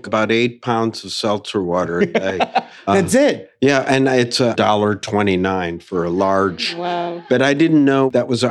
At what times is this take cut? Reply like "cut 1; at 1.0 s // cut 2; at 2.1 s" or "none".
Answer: none